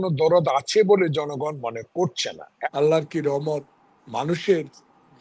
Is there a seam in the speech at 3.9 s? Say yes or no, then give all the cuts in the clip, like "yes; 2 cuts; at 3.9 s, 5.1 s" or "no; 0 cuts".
no; 1 cut; at 2.5 s